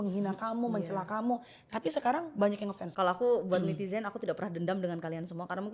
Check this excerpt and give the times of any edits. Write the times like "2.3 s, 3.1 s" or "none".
2.8 s